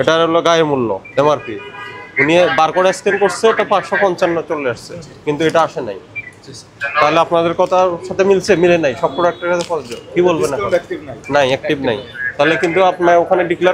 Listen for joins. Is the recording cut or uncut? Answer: uncut